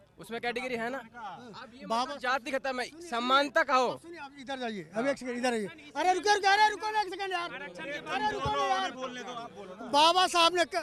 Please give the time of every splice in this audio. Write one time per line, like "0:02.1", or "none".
none